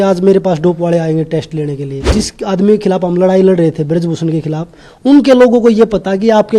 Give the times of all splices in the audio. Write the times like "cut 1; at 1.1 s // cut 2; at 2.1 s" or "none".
cut 1; at 2.1 s